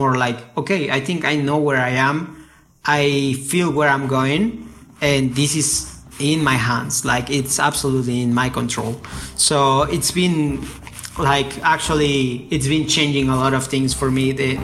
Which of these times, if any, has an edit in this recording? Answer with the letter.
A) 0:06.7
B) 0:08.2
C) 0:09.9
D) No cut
D